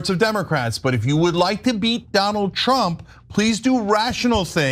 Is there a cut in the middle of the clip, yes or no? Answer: no